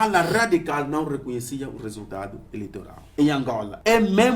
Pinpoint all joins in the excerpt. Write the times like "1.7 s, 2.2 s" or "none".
3.3 s